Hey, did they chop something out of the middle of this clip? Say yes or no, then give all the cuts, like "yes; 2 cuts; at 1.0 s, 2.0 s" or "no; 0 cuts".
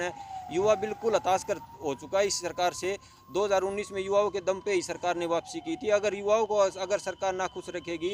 no; 0 cuts